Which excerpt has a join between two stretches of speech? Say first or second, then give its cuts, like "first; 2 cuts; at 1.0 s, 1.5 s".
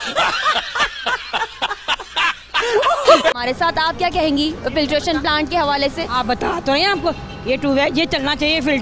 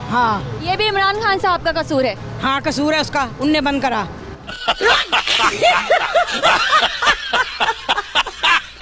second; 1 cut; at 4.5 s